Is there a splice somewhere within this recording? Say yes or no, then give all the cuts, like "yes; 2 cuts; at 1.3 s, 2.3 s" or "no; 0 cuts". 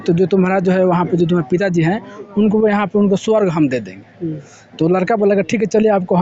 no; 0 cuts